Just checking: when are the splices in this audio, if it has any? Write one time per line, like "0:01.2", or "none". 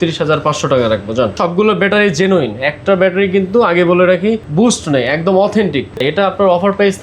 0:01.4
0:06.0